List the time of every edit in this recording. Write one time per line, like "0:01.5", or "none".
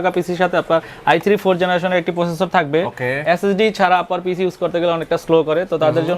0:03.2